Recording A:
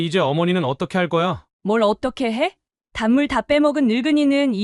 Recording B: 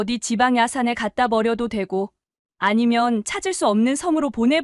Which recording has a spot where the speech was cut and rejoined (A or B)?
A